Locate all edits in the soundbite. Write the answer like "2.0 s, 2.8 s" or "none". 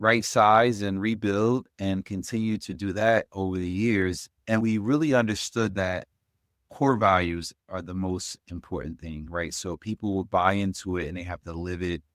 none